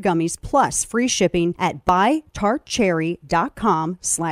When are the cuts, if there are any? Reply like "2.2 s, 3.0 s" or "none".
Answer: none